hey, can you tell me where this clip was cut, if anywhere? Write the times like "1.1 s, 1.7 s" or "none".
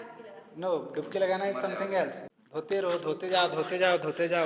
2.2 s